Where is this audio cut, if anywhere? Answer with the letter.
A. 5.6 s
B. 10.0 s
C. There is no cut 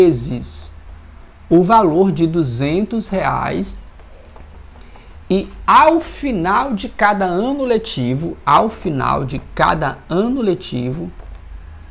C